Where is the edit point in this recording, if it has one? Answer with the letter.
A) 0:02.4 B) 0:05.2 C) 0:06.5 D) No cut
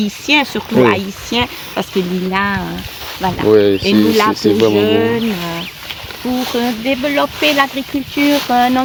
D